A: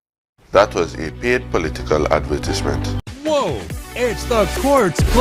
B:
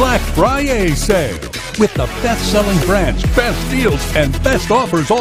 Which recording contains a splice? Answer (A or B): A